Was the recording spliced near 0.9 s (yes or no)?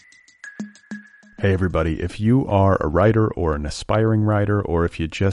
yes